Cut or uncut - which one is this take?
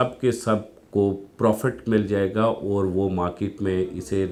uncut